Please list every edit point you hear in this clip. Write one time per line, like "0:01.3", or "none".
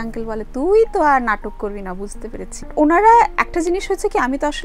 0:02.7